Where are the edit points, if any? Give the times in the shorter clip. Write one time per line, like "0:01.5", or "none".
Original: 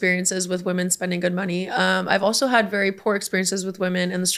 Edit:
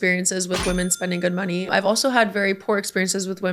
0:01.7